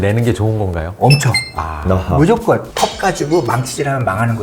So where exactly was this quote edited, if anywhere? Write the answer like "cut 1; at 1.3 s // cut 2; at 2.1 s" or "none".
cut 1; at 2.7 s